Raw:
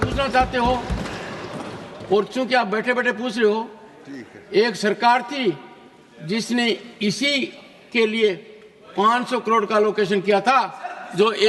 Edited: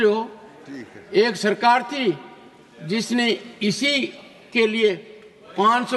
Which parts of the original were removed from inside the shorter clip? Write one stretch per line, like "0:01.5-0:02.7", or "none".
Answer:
none